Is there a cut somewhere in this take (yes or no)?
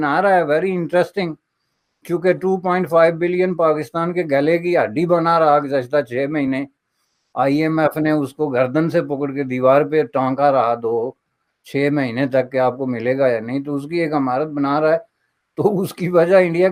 no